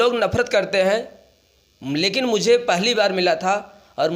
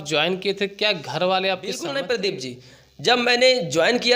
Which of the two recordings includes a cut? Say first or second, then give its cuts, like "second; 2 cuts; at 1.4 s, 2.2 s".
second; 1 cut; at 1.8 s